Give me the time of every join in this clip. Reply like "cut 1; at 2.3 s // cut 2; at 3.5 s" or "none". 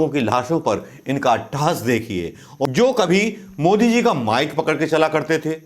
cut 1; at 2.7 s